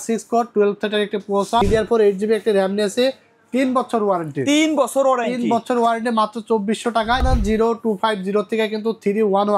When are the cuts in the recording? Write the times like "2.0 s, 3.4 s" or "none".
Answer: 1.6 s, 7.2 s